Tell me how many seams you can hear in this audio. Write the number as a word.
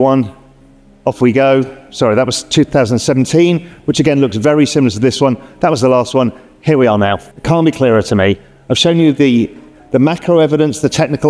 one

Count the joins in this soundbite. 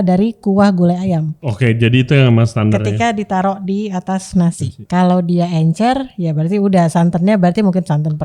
two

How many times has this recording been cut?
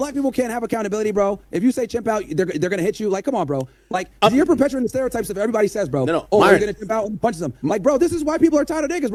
zero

